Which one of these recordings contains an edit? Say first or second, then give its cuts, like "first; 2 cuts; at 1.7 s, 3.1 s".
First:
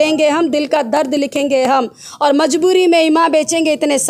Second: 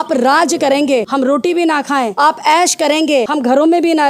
second; 3 cuts; at 1.1 s, 2.1 s, 3.3 s